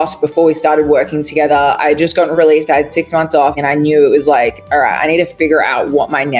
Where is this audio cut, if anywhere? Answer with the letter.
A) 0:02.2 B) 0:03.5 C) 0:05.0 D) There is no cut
B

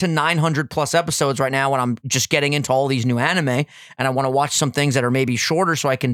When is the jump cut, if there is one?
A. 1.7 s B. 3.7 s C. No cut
C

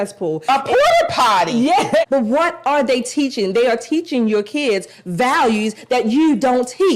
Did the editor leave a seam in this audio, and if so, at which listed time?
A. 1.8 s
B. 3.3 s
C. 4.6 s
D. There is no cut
A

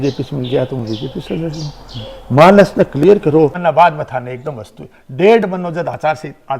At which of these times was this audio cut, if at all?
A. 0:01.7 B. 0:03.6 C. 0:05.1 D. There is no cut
B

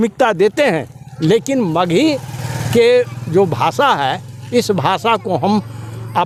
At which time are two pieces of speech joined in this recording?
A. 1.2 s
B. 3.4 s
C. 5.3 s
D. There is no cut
D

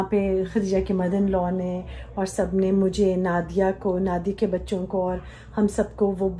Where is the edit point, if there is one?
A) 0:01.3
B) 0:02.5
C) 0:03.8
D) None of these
D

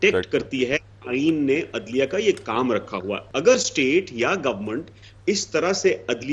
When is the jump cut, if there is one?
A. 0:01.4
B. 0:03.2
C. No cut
B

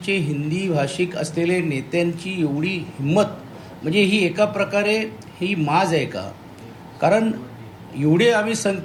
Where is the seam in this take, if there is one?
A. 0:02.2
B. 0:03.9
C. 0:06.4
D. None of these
D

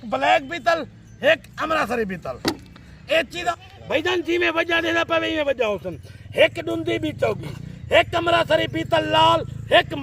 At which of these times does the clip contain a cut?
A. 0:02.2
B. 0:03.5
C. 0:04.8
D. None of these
B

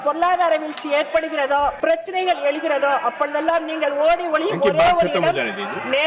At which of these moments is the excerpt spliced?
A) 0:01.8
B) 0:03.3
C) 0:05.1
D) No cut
A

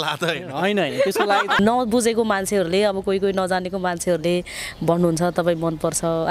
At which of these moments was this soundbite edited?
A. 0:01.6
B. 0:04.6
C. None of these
A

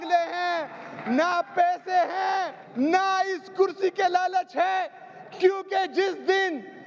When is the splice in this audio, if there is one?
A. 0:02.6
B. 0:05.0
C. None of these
A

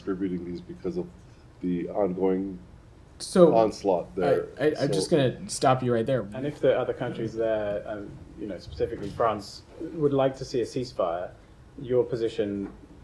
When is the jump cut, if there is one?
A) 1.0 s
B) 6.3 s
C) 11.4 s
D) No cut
B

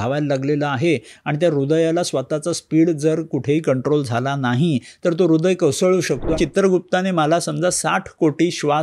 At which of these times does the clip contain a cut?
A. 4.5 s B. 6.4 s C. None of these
B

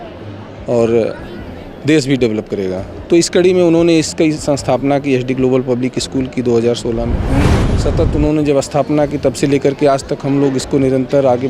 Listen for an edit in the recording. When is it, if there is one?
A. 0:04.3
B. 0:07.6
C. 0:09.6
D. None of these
B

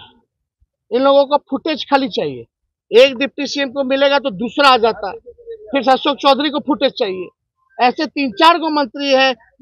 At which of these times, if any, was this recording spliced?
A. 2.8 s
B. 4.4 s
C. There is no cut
C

